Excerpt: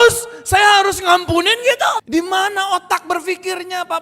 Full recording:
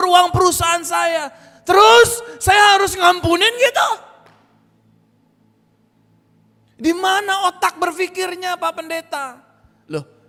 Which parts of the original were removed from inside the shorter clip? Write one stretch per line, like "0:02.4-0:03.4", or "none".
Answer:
0:04.0-0:06.8